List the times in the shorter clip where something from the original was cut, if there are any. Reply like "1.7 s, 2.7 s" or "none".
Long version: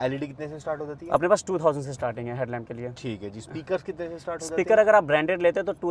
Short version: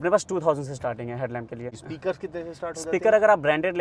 1.8 s